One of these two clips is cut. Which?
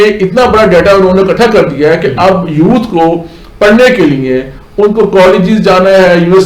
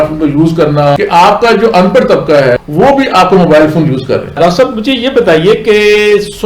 second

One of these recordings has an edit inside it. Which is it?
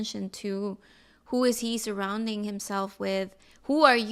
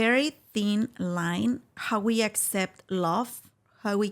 second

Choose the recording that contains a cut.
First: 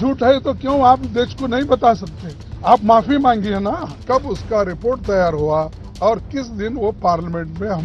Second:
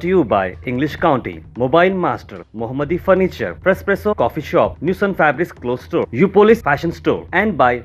first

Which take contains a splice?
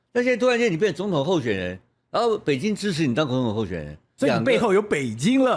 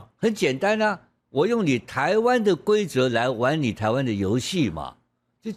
first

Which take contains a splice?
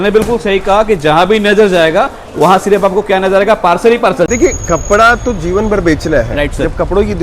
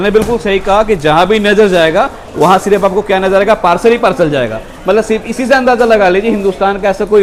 first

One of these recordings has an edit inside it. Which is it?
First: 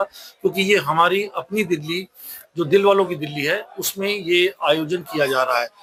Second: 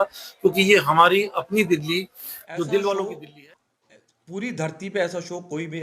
second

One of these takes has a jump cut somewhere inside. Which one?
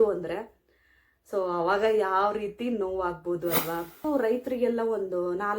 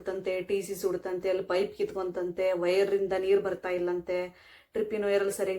first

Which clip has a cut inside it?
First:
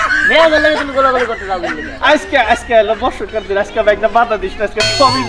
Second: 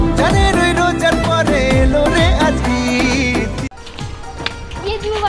second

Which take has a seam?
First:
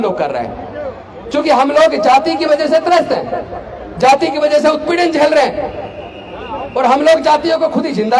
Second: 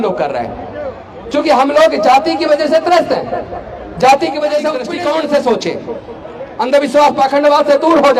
second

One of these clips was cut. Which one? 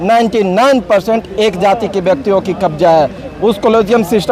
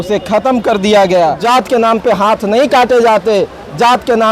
second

